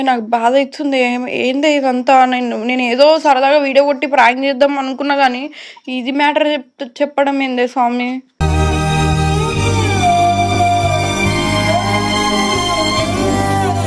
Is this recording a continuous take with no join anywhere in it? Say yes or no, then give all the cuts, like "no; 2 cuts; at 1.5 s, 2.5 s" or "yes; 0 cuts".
yes; 0 cuts